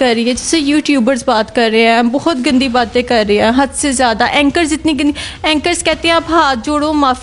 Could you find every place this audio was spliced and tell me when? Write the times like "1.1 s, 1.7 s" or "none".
none